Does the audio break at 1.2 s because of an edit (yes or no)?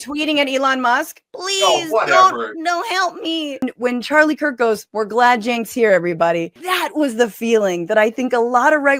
no